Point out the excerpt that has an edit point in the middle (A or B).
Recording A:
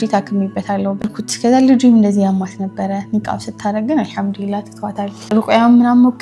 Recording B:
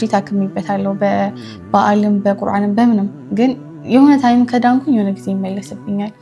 A